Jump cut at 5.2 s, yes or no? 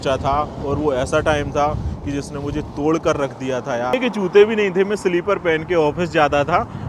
no